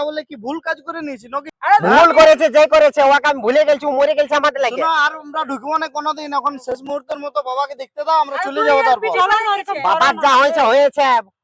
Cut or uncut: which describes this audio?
cut